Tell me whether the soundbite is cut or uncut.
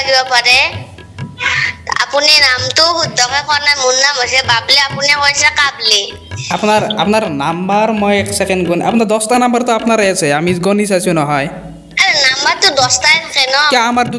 uncut